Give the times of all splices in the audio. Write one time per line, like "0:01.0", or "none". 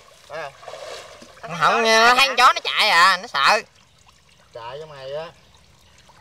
none